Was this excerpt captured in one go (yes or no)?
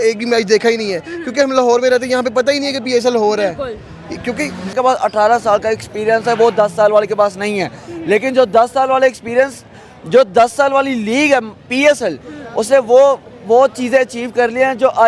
no